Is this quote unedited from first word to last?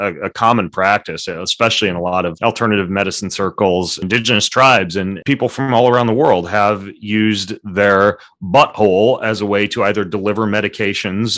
no; 3 cuts; at 2.4 s, 4.0 s, 5.2 s

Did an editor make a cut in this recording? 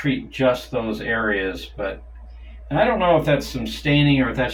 no; 0 cuts

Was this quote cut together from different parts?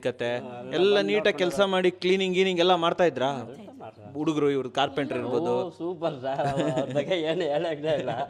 no; 0 cuts

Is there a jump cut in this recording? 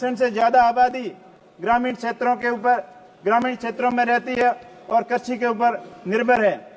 no; 0 cuts

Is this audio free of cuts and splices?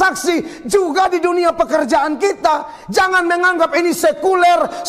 yes; 0 cuts

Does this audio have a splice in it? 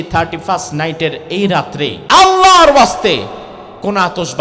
yes; 1 cut; at 2.0 s

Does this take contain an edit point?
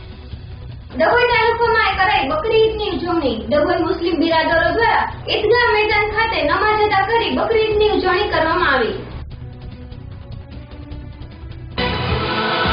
yes; 1 cut; at 11.7 s

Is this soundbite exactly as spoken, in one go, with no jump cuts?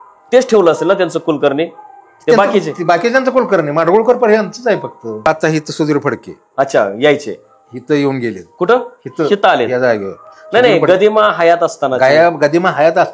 no; 1 cut; at 5.3 s

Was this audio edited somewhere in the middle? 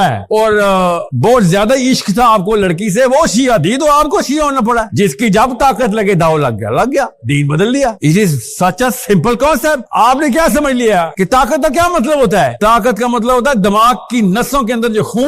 no; 0 cuts

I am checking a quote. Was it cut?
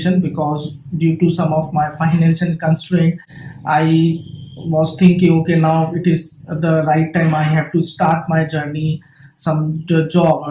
no; 0 cuts

